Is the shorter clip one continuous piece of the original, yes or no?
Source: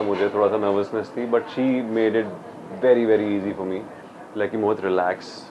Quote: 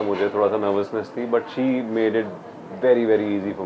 yes